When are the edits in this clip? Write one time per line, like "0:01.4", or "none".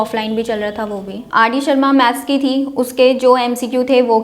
0:01.2